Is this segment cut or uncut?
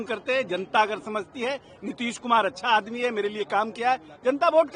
uncut